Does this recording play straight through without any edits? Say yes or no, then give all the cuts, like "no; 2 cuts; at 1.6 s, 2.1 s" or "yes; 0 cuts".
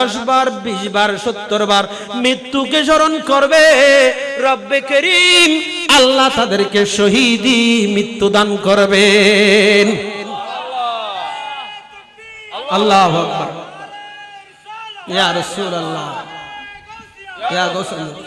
yes; 0 cuts